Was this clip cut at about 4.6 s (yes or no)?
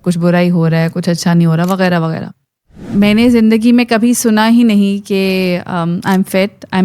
no